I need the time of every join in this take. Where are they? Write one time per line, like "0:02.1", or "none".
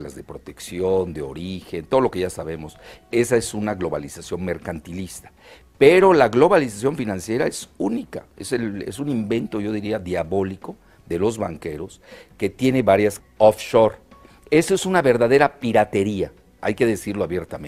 none